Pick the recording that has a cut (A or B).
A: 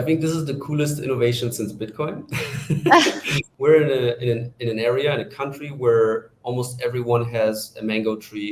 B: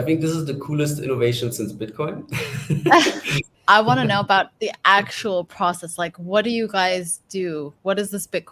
B